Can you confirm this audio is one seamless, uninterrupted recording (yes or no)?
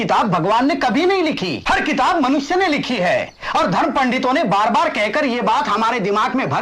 no